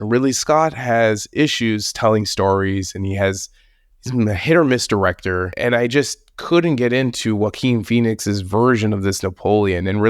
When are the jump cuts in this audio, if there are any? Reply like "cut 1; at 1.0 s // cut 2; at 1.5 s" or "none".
cut 1; at 5.5 s